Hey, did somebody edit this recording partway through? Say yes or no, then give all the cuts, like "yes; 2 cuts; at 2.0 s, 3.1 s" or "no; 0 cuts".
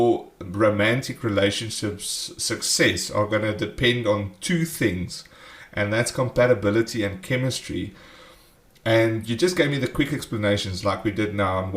yes; 1 cut; at 6.3 s